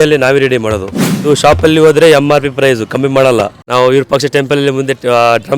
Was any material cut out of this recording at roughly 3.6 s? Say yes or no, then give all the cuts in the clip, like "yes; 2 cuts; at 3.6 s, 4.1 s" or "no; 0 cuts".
yes; 2 cuts; at 1.2 s, 3.6 s